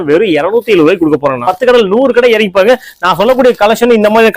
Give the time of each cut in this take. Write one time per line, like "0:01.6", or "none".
0:01.4